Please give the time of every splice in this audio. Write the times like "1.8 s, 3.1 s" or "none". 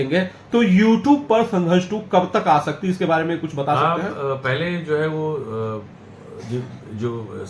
none